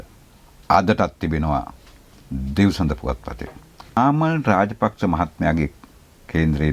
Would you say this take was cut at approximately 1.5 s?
no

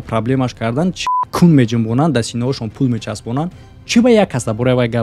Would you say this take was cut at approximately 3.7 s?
no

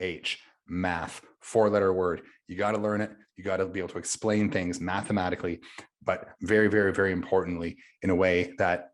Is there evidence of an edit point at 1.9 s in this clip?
no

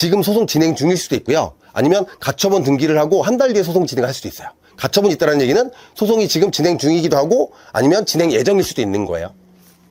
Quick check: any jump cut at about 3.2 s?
no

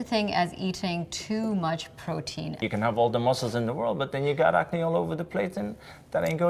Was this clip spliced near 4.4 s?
no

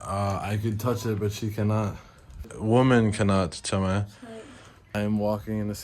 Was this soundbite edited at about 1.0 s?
no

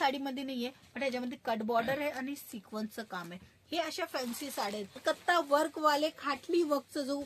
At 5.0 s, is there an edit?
yes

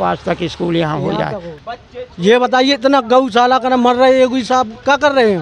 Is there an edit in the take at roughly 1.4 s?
yes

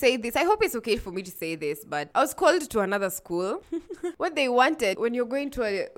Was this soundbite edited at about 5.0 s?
yes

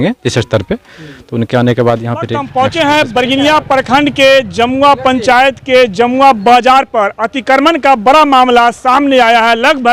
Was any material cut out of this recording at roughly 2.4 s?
yes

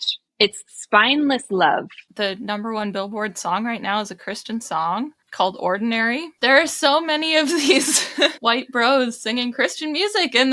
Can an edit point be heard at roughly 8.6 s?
no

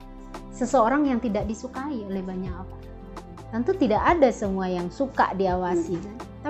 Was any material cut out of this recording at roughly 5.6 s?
no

